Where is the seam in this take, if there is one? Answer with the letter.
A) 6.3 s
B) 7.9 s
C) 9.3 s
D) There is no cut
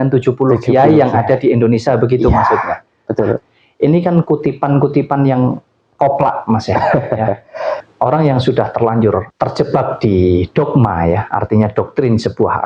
B